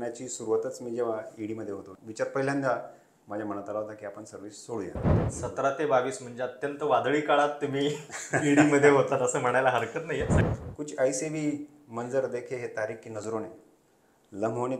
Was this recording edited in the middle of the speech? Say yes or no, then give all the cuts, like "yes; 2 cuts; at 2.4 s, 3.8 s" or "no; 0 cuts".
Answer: yes; 3 cuts; at 1.9 s, 5.2 s, 10.4 s